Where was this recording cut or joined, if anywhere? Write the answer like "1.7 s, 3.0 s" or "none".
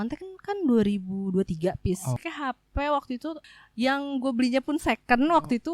2.2 s, 3.4 s